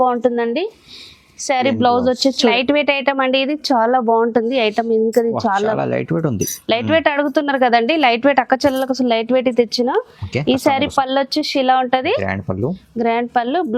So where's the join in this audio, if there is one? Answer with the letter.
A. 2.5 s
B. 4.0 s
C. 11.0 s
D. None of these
A